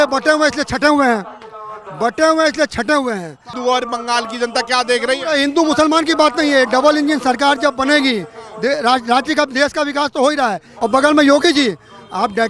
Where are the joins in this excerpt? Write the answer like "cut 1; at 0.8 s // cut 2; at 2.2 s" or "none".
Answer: cut 1; at 3.5 s // cut 2; at 10.7 s